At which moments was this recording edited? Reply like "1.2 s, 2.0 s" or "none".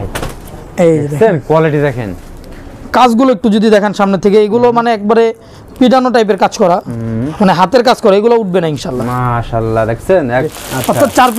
10.5 s